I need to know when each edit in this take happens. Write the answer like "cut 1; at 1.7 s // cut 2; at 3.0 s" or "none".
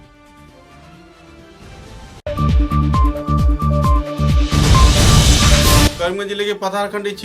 cut 1; at 2.2 s // cut 2; at 5.9 s